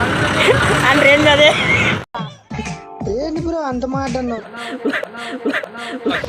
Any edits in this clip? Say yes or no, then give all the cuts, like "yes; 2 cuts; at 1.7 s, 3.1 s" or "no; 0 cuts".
yes; 1 cut; at 4.5 s